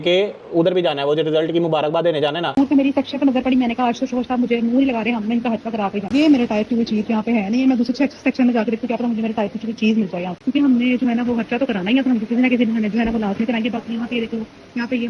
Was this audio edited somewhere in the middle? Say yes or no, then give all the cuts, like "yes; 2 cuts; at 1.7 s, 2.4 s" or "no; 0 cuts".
yes; 3 cuts; at 2.5 s, 6.0 s, 10.3 s